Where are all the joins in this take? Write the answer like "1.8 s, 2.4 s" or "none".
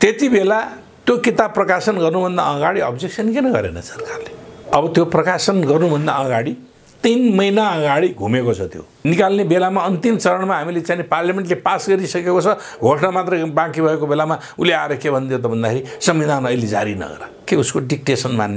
4.7 s, 8.8 s